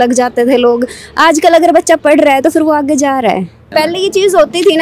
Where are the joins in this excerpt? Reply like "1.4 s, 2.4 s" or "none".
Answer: 3.6 s